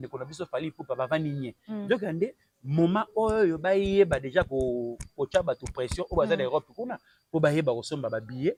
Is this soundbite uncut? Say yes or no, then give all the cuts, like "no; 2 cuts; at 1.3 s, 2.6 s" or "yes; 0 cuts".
yes; 0 cuts